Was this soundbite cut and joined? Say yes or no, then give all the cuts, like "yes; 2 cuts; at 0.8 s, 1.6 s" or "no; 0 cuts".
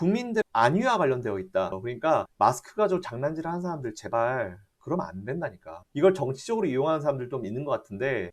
yes; 2 cuts; at 1.8 s, 5.9 s